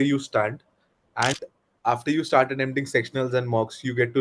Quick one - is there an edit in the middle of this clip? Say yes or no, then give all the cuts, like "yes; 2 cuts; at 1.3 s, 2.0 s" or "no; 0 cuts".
yes; 1 cut; at 1.4 s